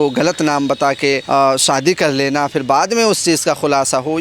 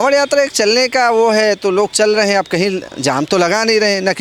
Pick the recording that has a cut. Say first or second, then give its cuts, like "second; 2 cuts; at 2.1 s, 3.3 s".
first; 1 cut; at 1.2 s